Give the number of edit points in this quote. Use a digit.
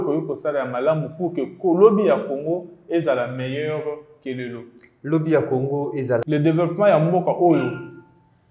1